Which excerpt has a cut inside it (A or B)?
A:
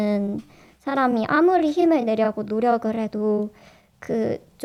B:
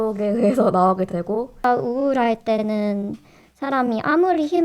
B